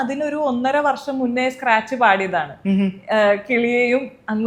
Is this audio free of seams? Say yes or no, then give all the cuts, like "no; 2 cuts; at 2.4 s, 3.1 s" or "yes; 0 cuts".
yes; 0 cuts